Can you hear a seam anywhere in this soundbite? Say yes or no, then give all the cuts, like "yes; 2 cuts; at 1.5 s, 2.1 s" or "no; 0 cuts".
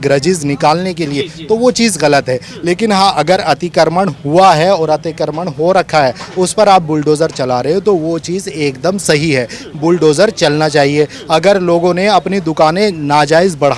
no; 0 cuts